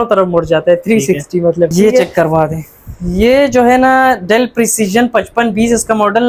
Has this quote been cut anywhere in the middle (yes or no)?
yes